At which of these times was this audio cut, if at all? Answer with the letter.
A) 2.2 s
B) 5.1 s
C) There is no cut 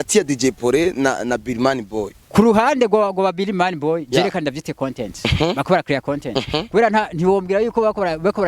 A